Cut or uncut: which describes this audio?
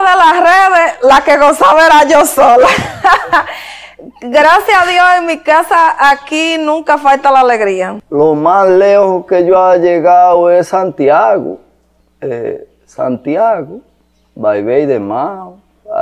cut